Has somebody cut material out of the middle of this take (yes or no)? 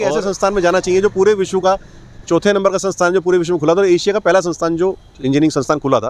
no